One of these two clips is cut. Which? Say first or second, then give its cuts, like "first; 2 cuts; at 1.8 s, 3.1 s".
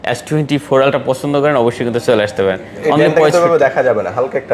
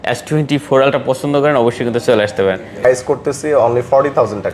second; 1 cut; at 2.8 s